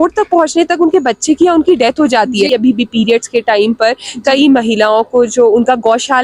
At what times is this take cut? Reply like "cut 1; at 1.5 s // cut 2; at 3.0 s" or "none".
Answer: cut 1; at 2.5 s